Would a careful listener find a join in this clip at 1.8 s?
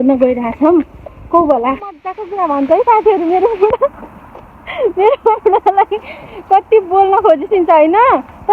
yes; 1 cut; at 1.8 s

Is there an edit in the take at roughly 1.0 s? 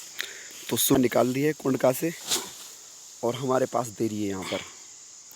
yes; 1 cut; at 1.0 s

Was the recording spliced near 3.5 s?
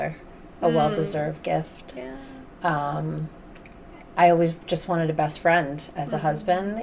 no; 0 cuts

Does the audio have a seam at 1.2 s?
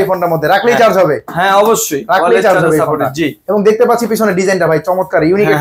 no; 0 cuts

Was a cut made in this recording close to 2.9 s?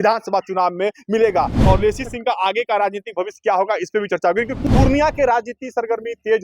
no; 2 cuts; at 1.6 s, 4.6 s

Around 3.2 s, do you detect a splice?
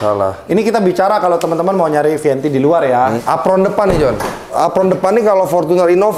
yes; 2 cuts; at 3.2 s, 4.5 s

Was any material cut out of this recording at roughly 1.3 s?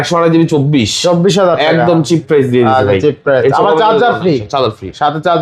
no; 0 cuts

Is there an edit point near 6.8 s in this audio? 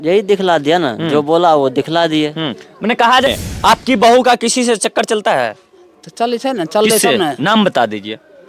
no; 1 cut; at 3.3 s

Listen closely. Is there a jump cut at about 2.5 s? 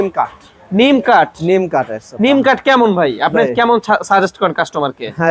no; 0 cuts

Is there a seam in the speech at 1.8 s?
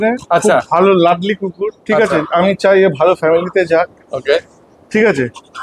no; 0 cuts

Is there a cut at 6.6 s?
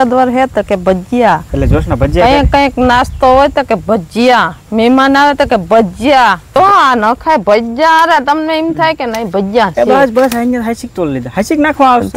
yes; 1 cut; at 6.6 s

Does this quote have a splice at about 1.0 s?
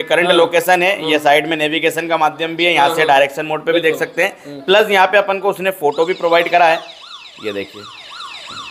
no; 0 cuts

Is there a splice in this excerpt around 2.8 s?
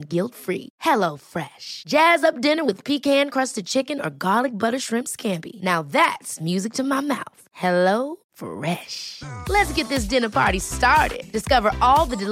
no; 0 cuts

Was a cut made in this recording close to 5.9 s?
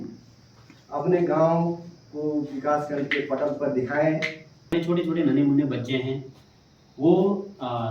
no; 1 cut; at 4.7 s

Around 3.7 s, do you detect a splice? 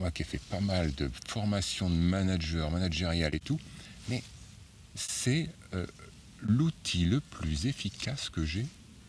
no; 0 cuts

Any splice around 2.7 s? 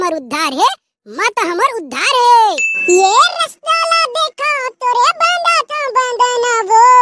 yes; 1 cut; at 2.7 s

